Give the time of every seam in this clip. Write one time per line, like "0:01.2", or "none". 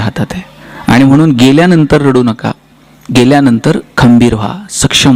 none